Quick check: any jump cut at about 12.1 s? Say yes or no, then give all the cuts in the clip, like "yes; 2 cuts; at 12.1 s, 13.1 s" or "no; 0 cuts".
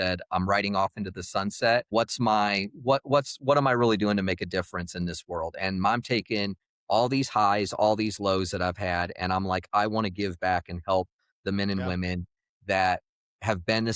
no; 1 cut; at 1.9 s